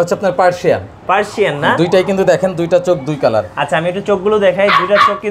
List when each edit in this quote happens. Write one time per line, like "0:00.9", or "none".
none